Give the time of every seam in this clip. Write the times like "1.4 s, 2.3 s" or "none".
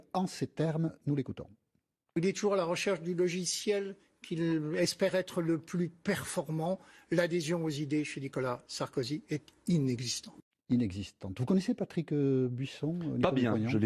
5.9 s